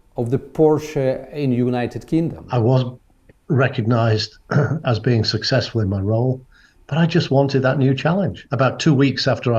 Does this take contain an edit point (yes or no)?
yes